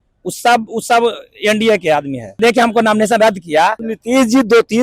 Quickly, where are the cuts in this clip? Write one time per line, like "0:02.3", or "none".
0:02.4
0:03.9